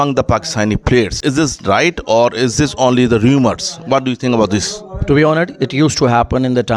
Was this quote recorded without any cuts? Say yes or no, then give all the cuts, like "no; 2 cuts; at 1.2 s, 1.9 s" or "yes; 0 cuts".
no; 1 cut; at 1.2 s